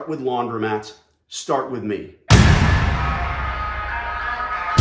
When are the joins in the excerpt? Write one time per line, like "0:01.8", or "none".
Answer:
0:02.1

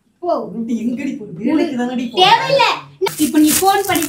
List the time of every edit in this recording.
0:03.1

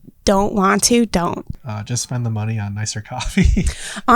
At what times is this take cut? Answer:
0:01.4

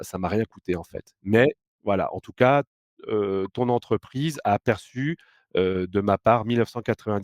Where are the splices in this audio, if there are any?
none

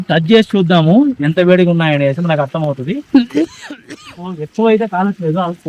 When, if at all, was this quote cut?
none

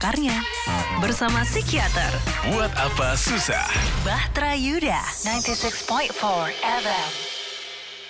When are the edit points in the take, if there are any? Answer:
none

